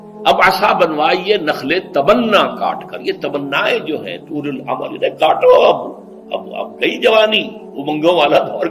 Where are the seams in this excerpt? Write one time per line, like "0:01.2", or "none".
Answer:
none

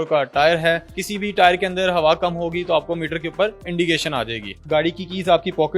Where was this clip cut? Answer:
0:01.0
0:04.6

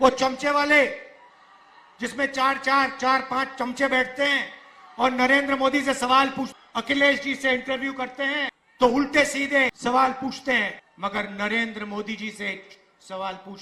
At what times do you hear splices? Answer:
0:06.5
0:08.6
0:09.8
0:10.8

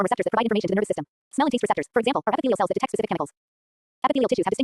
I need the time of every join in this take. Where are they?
0:01.2

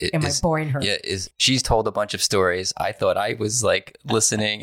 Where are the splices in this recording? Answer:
0:01.3

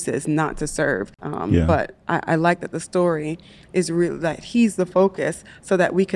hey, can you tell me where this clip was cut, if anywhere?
0:01.2

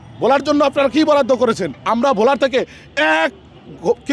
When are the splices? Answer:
0:01.8

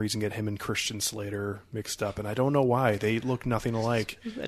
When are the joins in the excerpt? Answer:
none

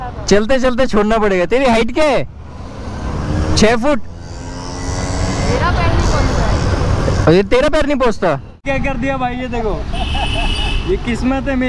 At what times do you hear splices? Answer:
0:08.6

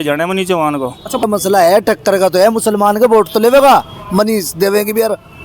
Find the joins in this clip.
0:01.2

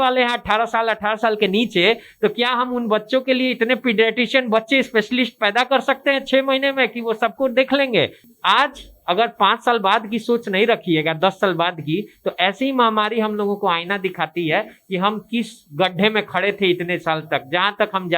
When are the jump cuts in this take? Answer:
0:08.2

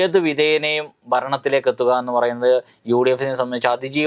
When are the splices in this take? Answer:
none

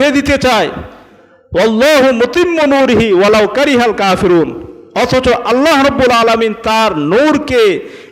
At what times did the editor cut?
none

